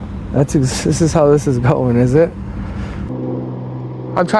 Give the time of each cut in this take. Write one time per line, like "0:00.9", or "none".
0:03.1